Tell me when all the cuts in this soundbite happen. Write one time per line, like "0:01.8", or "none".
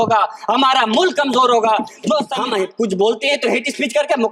0:02.3